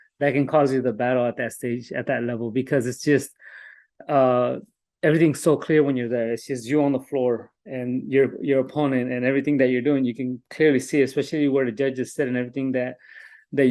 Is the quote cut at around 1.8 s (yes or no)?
no